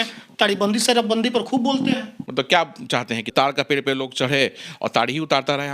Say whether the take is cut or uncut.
cut